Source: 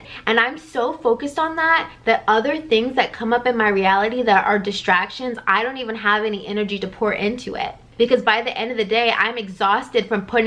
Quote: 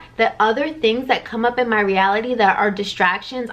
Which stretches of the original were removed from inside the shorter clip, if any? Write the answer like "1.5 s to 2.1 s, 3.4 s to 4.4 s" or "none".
none

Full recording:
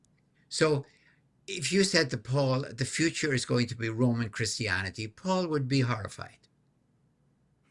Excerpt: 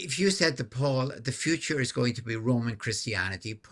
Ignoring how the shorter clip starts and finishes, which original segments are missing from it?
none

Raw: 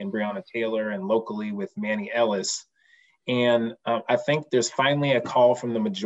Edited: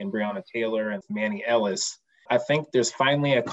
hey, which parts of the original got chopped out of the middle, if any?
1.0 s to 1.7 s, 2.9 s to 4.0 s

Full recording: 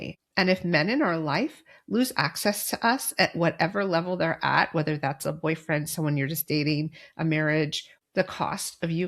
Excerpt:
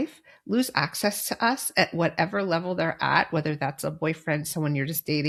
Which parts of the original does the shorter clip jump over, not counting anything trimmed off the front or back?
none

